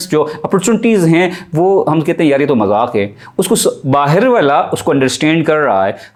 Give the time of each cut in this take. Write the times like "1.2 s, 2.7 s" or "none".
none